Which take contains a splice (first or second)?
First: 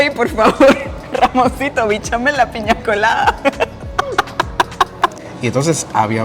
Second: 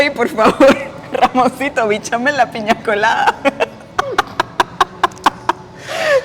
first